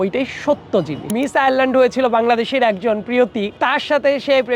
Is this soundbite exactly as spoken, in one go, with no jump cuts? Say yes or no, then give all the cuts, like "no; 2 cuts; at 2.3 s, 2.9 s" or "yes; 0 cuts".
no; 2 cuts; at 1.1 s, 3.5 s